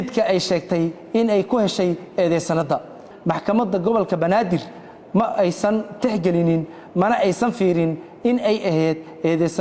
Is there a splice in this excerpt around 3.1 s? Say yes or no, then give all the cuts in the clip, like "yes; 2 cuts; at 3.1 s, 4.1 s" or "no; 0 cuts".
yes; 1 cut; at 3.1 s